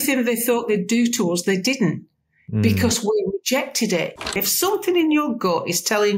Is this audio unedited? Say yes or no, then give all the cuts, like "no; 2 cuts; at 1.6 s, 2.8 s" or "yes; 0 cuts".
no; 1 cut; at 4.4 s